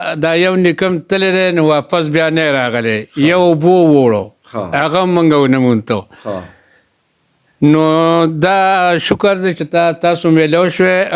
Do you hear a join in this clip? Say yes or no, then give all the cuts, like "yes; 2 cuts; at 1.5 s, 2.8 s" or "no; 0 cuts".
no; 0 cuts